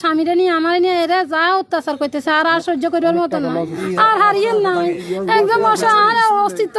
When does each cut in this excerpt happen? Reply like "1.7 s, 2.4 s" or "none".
3.8 s, 5.0 s